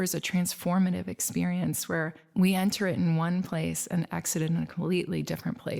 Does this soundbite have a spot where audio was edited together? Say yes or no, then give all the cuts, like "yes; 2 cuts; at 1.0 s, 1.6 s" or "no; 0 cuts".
no; 0 cuts